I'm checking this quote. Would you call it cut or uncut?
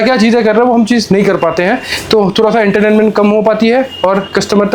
uncut